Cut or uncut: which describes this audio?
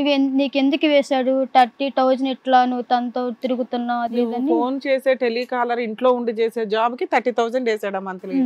uncut